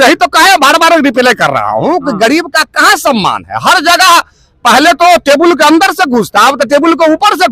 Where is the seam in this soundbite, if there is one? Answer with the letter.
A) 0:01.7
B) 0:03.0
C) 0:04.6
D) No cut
D